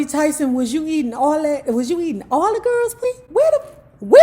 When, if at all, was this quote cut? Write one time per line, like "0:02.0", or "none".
0:03.0